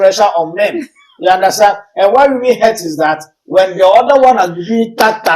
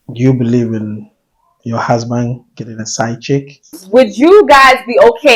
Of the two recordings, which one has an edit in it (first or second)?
second